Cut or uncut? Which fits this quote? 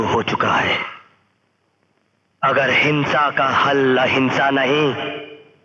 uncut